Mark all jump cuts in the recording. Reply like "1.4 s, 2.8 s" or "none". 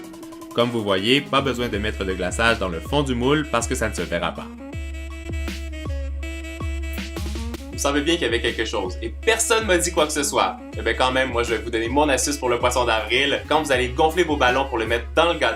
none